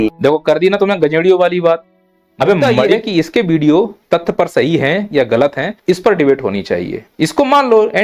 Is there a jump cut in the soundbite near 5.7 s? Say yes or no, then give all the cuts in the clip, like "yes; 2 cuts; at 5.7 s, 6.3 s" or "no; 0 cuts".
yes; 4 cuts; at 3.0 s, 4.0 s, 5.7 s, 7.0 s